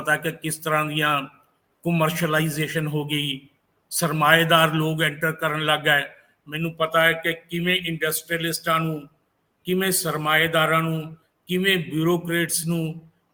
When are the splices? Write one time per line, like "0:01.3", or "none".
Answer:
none

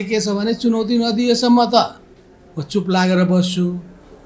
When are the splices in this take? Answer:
none

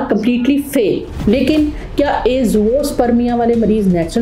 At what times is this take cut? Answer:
0:01.1

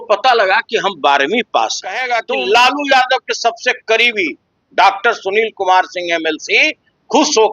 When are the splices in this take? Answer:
0:02.1

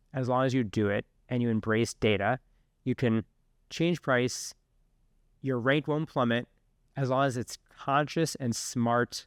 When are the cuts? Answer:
none

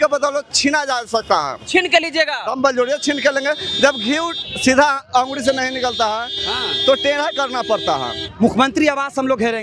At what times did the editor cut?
0:08.2

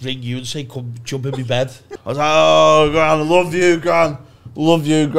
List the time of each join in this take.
0:01.9

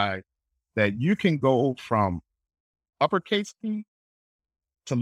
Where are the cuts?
none

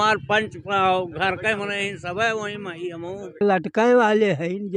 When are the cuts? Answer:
0:03.3

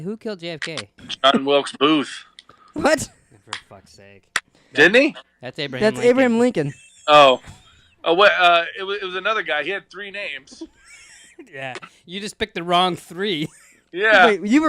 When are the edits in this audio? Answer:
0:01.1
0:04.6

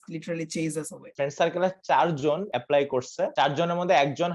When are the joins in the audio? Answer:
0:01.0
0:02.5
0:03.3

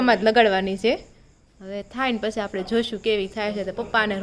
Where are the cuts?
none

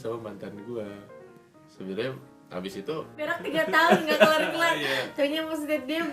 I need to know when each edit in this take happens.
0:03.4

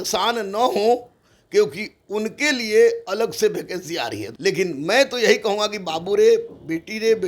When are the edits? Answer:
0:04.3

